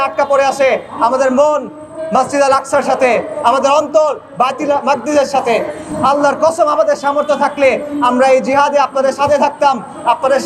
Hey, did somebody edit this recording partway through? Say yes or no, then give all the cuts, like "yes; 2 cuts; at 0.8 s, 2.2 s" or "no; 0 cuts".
no; 0 cuts